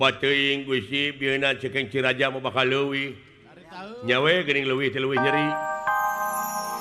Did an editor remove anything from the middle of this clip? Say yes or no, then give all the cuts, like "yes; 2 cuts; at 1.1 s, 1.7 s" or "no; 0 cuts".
yes; 1 cut; at 5.6 s